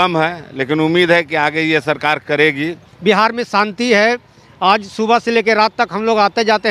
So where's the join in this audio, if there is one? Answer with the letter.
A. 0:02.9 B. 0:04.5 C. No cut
A